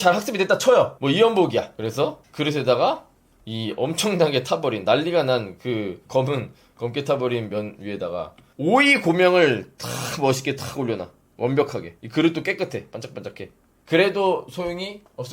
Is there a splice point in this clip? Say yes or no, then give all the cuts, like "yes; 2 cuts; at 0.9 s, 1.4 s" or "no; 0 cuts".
yes; 2 cuts; at 1.0 s, 1.8 s